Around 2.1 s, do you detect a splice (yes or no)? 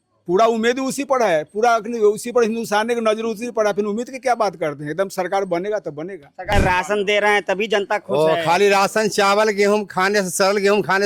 no